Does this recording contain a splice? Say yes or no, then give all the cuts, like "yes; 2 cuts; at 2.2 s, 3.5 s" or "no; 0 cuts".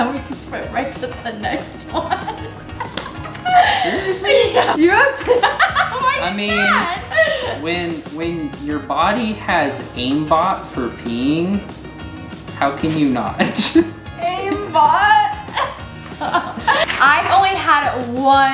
yes; 2 cuts; at 4.7 s, 16.8 s